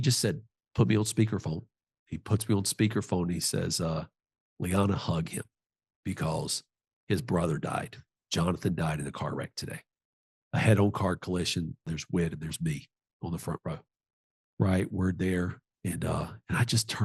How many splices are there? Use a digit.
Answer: 1